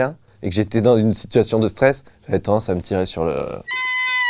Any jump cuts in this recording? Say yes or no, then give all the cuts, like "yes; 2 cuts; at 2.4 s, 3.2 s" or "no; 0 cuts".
no; 0 cuts